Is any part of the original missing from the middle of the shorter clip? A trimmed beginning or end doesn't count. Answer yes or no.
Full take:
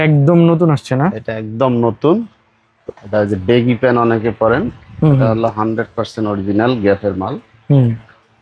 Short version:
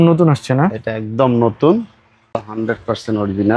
yes